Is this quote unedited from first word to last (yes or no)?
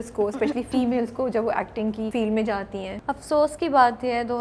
no